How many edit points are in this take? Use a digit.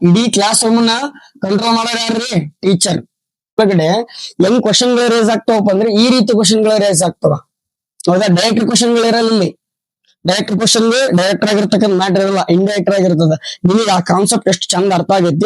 1